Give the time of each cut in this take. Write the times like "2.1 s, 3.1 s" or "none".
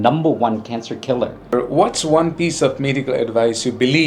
1.5 s